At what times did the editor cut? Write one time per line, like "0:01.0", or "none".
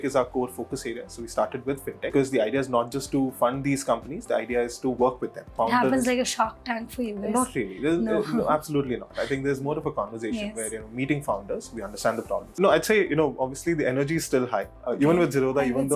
0:02.1
0:05.5
0:12.5

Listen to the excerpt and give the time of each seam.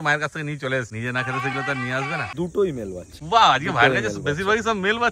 0:00.9
0:02.3
0:03.1

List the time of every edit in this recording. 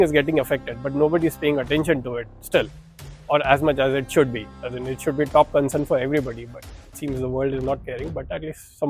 none

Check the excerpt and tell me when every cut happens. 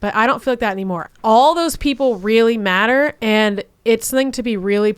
0:01.1
0:03.2

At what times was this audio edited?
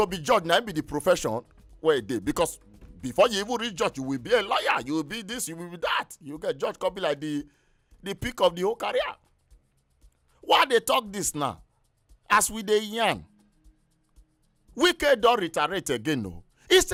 none

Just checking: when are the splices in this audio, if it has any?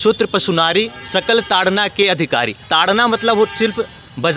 0:02.6

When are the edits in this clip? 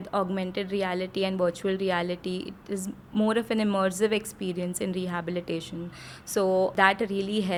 none

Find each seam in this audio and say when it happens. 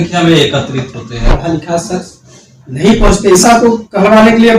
0:01.3
0:03.4

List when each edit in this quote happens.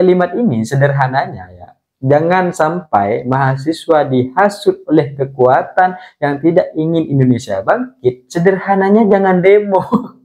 none

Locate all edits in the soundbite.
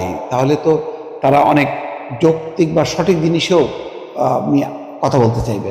none

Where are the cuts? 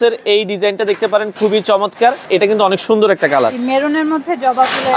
0:02.2

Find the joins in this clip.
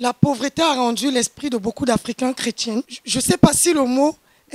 0:03.0

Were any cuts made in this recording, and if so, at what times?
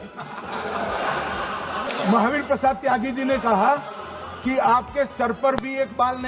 0:01.8

